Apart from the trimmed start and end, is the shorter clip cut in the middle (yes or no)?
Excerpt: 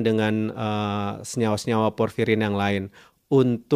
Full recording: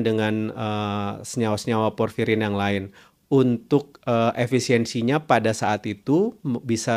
no